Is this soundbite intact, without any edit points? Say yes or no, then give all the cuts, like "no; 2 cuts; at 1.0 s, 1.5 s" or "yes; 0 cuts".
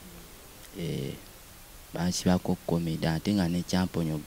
yes; 0 cuts